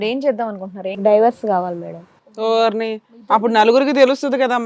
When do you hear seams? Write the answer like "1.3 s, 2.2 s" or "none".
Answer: none